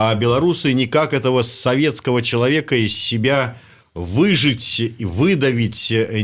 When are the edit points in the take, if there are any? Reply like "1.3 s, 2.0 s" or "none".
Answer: none